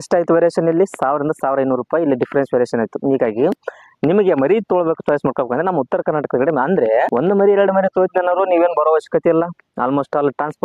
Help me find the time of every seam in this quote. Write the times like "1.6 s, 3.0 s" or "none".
none